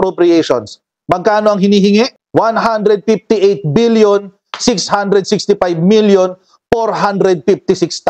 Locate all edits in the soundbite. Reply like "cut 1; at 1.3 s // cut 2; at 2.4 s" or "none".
none